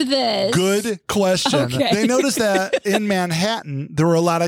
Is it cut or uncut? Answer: cut